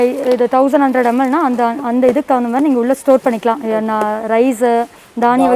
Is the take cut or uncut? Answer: uncut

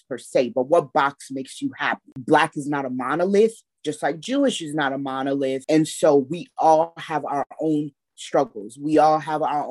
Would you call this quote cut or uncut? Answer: cut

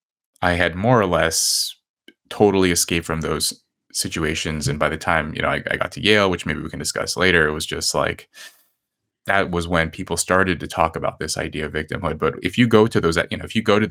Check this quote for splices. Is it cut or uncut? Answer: uncut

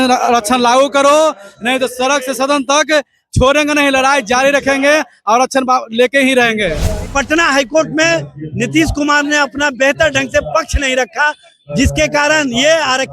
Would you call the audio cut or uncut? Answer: cut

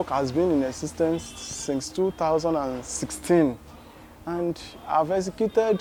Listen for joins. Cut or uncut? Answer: uncut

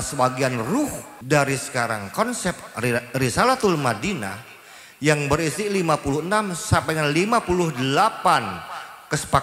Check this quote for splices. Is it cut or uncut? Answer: cut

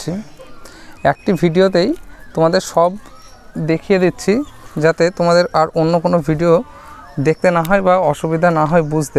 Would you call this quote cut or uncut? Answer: uncut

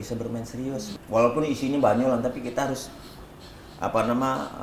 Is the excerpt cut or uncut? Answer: cut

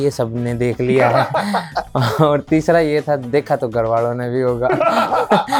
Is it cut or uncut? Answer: uncut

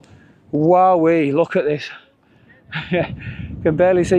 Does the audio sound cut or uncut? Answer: uncut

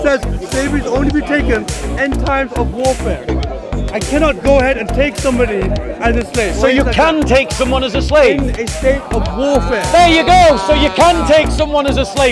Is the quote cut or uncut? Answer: uncut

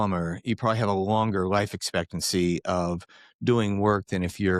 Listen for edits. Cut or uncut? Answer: uncut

